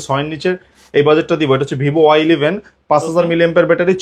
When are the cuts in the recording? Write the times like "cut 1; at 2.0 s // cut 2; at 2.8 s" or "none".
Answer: none